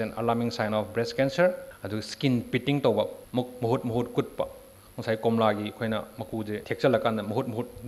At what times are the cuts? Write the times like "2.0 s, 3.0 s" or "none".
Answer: 1.7 s, 3.2 s, 6.6 s